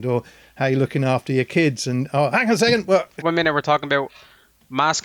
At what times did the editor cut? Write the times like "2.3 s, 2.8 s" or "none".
3.1 s

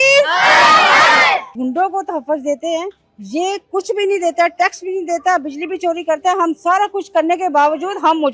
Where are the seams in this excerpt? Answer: 1.5 s

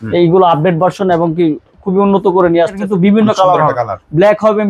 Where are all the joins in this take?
2.8 s

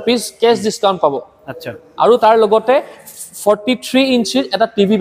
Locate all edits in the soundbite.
none

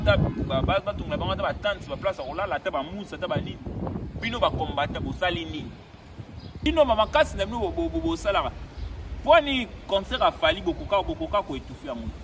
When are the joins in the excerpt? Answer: 6.7 s

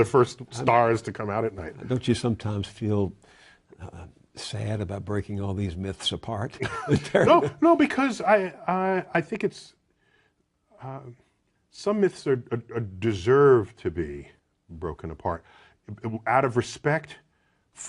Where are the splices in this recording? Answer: 7.1 s

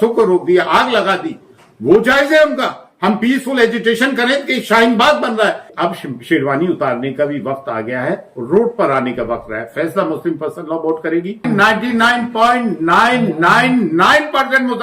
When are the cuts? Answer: 5.7 s, 11.5 s

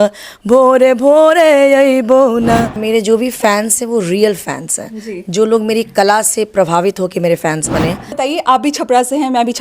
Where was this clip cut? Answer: 2.8 s, 8.1 s

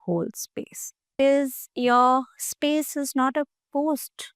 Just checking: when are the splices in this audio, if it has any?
1.1 s

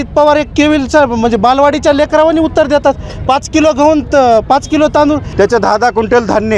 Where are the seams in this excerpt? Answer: 5.3 s

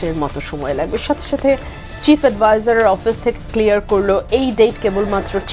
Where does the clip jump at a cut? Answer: none

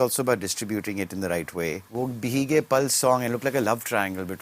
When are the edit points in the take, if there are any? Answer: 1.8 s

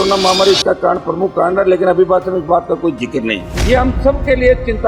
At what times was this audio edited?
3.5 s

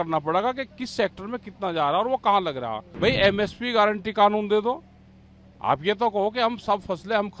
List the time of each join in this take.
2.8 s

